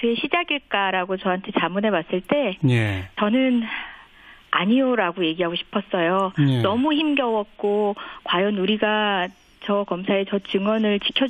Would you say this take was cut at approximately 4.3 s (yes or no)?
no